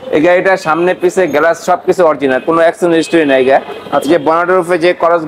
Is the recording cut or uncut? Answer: uncut